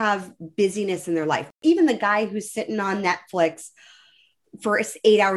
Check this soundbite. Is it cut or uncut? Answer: cut